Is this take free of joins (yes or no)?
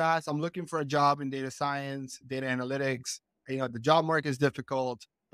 yes